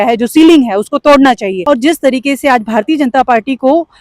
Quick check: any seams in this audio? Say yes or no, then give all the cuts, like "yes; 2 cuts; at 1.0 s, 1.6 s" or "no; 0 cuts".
yes; 1 cut; at 1.5 s